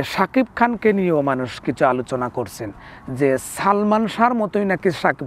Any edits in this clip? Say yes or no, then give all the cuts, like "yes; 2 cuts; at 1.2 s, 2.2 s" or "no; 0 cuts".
no; 0 cuts